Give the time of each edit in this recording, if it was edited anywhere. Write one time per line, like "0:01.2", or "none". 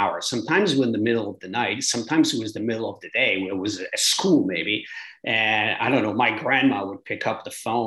none